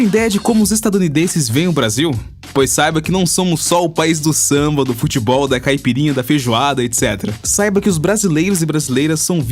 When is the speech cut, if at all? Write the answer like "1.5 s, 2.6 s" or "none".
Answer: 8.5 s